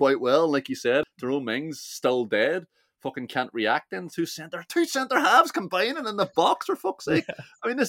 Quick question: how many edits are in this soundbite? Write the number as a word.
one